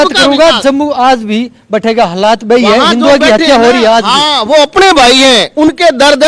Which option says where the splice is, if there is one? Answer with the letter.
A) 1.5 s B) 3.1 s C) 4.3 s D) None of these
D